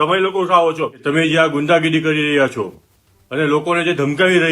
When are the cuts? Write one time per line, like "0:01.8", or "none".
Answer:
0:01.0